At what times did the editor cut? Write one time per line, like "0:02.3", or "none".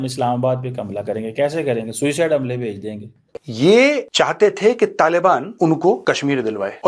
0:03.4